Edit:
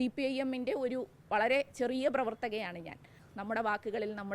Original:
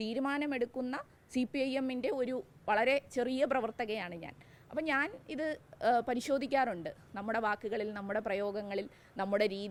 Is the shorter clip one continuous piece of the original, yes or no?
no